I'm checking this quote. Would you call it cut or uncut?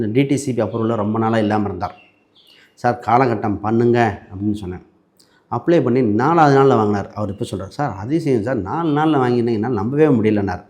uncut